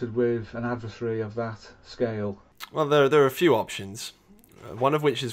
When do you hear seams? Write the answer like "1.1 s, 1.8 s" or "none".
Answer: 2.6 s